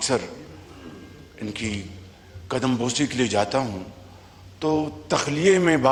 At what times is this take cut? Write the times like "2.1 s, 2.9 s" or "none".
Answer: none